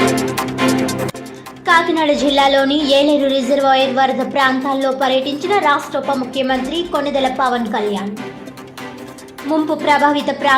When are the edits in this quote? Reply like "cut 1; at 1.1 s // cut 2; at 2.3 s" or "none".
cut 1; at 0.9 s // cut 2; at 1.1 s